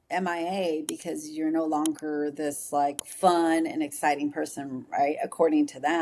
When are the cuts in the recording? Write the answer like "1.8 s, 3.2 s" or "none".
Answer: none